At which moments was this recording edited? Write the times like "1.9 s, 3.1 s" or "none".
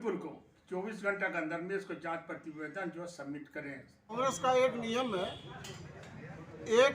4.1 s